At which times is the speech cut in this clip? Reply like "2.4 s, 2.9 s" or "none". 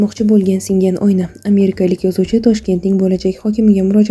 none